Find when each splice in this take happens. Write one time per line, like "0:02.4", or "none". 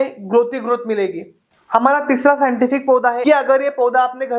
0:01.6
0:03.2